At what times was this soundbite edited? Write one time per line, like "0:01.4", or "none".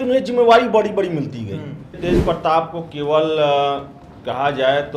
0:02.0